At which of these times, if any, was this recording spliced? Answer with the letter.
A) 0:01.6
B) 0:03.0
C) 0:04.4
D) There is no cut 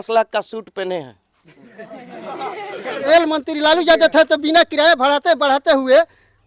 B